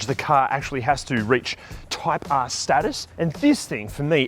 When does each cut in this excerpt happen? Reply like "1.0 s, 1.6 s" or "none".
3.0 s